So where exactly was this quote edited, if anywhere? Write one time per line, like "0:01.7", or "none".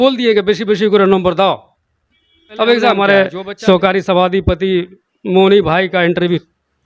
0:03.0

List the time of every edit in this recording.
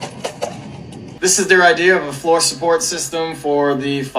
0:01.0

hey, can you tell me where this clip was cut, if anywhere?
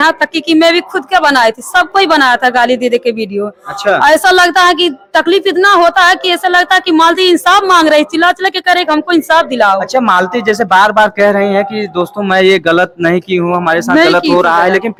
none

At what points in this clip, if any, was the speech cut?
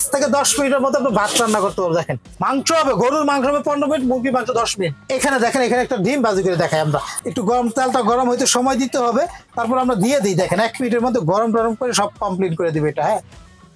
0:02.3
0:05.0
0:07.1

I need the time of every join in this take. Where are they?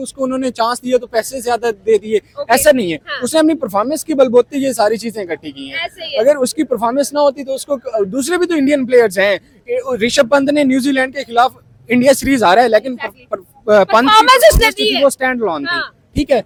none

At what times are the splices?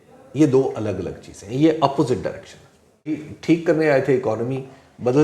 0:03.3

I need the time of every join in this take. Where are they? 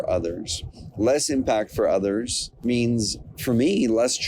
0:02.4

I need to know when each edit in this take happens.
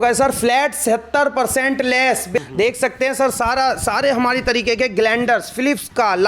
0:02.4

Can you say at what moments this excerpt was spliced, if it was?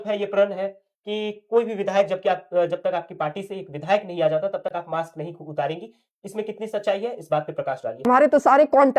0:08.1

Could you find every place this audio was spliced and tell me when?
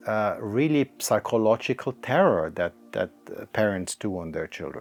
none

